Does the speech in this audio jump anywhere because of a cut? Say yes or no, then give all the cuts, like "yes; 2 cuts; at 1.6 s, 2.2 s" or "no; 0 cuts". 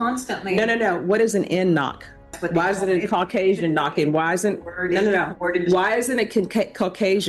yes; 1 cut; at 2.4 s